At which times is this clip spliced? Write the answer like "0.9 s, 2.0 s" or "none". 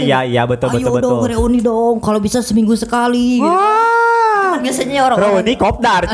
none